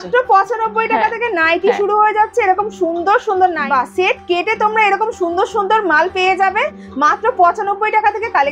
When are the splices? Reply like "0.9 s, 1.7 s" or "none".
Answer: 3.6 s